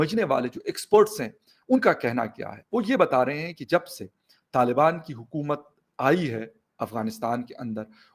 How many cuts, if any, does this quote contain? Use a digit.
0